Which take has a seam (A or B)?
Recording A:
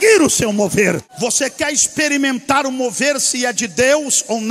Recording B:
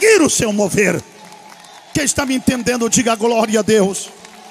A